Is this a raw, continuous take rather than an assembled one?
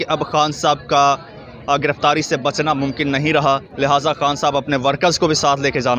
yes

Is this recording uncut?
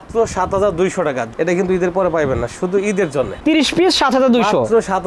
no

